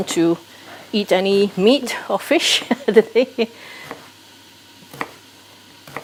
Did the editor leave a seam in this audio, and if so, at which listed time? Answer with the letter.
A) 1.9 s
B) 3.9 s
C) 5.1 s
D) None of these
D